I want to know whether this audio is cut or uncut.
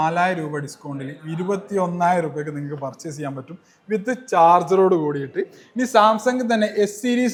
uncut